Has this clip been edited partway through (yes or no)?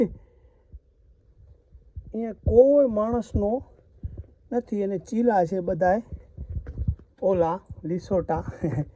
no